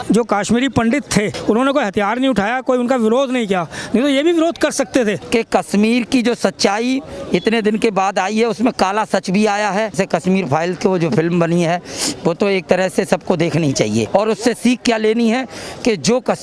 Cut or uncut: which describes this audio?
cut